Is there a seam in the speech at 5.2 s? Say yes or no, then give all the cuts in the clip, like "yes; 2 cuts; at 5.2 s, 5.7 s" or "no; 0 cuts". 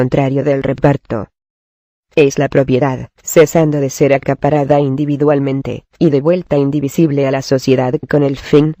yes; 1 cut; at 5.2 s